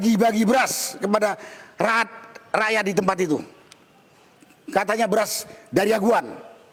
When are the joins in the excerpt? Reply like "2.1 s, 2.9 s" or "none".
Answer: none